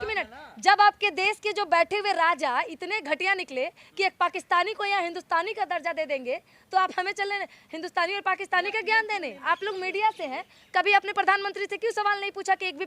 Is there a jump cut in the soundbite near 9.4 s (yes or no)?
yes